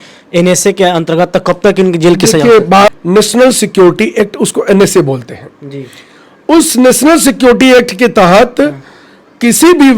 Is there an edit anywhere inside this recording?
yes; 1 cut; at 2.9 s

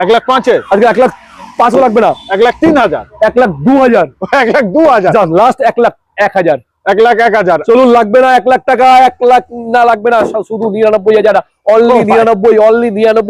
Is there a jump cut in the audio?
no; 0 cuts

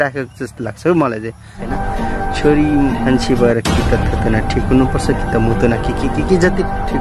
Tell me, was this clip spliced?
yes; 1 cut; at 1.7 s

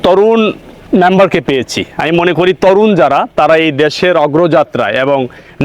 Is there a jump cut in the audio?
no; 0 cuts

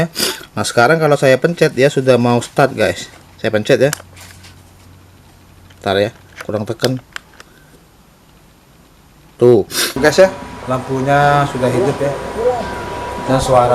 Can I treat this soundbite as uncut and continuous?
no; 1 cut; at 10.0 s

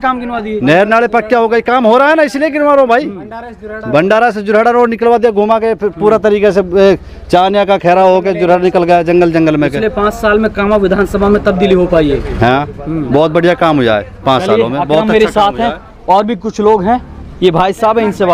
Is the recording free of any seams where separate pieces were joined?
yes; 0 cuts

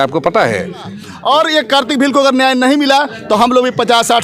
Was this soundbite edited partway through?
yes; 1 cut; at 1.1 s

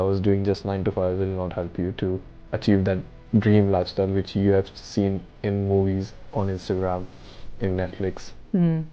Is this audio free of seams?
yes; 0 cuts

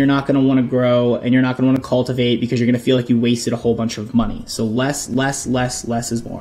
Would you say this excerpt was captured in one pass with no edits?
yes; 0 cuts

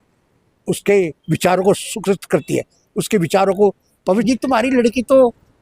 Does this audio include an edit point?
yes; 1 cut; at 4.2 s

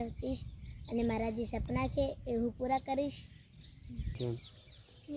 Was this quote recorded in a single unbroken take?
no; 1 cut; at 4.2 s

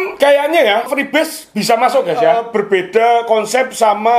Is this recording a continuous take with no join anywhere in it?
no; 1 cut; at 2.4 s

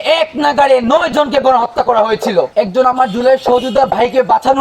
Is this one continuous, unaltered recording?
no; 1 cut; at 2.5 s

